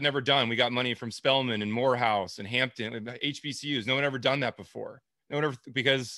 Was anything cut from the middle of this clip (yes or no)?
no